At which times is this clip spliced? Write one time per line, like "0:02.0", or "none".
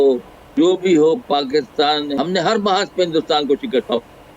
0:02.1